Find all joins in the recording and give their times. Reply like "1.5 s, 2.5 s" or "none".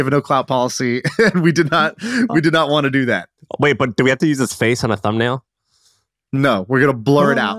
none